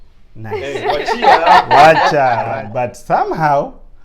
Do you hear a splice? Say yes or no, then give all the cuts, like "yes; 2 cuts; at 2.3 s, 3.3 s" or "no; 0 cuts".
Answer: yes; 1 cut; at 2.4 s